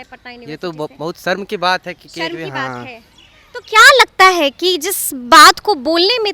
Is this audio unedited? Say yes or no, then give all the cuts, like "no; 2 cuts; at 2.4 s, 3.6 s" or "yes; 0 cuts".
yes; 0 cuts